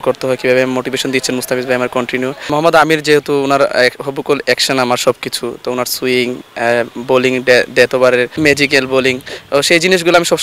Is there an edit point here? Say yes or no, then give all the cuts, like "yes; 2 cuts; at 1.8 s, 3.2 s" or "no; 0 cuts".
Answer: yes; 2 cuts; at 2.5 s, 8.3 s